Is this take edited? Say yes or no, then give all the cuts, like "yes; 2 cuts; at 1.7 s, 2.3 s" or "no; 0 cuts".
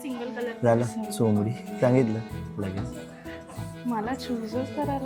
no; 0 cuts